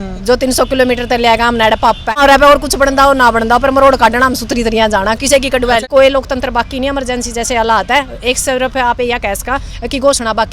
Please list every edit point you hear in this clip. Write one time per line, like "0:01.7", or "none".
0:02.2
0:05.8